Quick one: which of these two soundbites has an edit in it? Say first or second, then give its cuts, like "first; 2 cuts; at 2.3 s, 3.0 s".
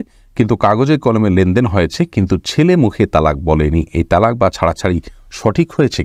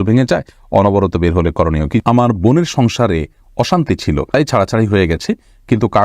second; 2 cuts; at 2.0 s, 4.3 s